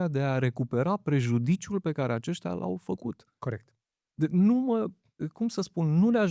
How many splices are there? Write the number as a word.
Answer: zero